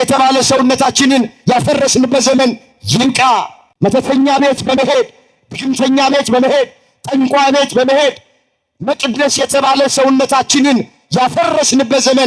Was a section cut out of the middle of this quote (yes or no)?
yes